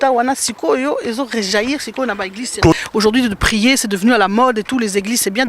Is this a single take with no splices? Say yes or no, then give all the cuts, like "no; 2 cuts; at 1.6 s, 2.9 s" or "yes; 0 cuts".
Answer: no; 1 cut; at 2.7 s